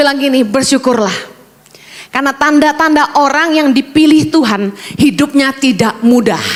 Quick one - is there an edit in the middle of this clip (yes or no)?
no